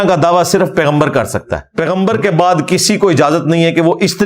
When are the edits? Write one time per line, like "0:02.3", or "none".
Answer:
0:01.6